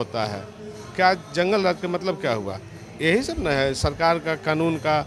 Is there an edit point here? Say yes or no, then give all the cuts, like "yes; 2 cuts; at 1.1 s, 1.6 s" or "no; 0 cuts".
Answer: no; 0 cuts